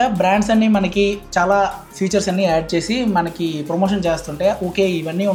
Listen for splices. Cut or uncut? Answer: uncut